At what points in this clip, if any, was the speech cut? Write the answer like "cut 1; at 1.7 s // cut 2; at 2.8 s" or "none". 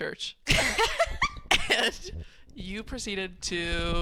none